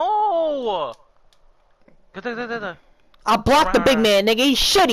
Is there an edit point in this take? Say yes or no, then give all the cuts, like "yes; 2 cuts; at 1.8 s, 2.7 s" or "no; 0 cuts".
no; 0 cuts